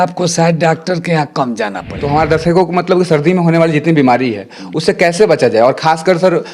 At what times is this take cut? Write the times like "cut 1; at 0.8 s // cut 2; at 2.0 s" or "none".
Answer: cut 1; at 1.9 s